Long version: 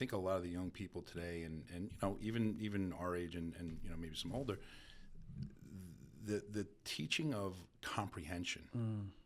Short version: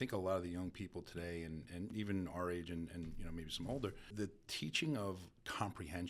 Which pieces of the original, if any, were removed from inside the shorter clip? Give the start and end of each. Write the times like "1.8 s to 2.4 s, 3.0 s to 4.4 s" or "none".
1.9 s to 2.6 s, 4.8 s to 6.5 s